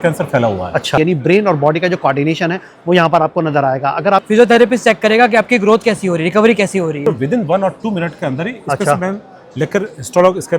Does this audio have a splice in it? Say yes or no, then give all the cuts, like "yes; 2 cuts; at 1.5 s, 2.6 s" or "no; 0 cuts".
yes; 3 cuts; at 1.0 s, 4.2 s, 7.0 s